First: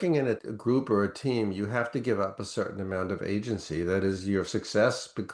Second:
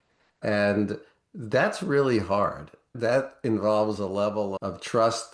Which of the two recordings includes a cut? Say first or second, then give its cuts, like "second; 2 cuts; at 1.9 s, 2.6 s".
second; 1 cut; at 2.9 s